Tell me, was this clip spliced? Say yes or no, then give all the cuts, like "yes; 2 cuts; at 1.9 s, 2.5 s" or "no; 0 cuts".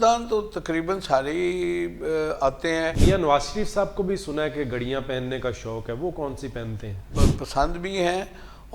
yes; 2 cuts; at 3.0 s, 7.0 s